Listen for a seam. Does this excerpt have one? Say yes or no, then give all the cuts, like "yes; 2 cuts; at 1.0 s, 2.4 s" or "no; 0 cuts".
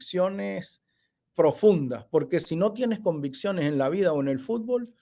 no; 0 cuts